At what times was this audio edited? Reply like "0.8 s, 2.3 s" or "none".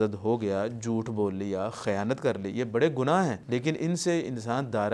3.4 s